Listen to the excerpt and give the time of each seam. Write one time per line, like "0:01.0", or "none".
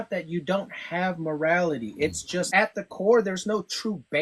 0:02.5